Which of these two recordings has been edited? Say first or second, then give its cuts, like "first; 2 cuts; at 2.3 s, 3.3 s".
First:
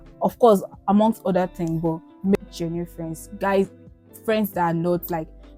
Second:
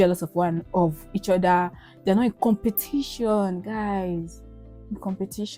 first; 1 cut; at 2.4 s